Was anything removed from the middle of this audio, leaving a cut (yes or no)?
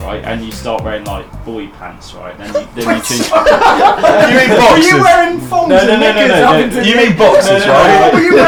no